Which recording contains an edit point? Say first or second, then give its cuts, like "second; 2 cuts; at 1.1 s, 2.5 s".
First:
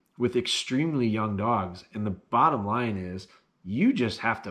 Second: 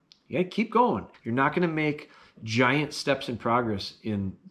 second; 1 cut; at 1.1 s